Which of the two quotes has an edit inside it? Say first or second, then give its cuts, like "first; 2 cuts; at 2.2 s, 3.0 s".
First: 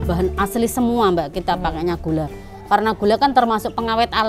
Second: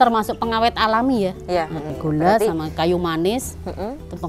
second; 1 cut; at 1.9 s